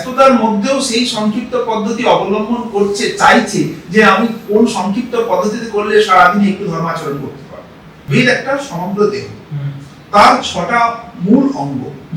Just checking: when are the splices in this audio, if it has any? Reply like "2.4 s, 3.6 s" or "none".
8.1 s